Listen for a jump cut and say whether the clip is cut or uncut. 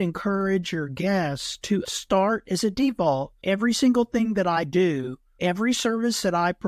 cut